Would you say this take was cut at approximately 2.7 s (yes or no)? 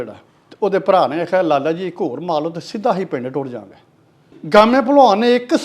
no